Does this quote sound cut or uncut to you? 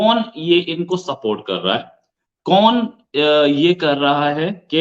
uncut